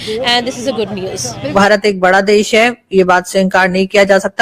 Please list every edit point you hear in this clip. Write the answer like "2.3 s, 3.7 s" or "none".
1.4 s